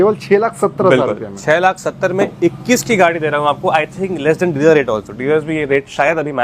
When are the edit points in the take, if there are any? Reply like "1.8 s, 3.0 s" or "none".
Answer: none